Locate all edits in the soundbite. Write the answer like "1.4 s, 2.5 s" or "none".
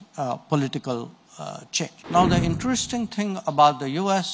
2.0 s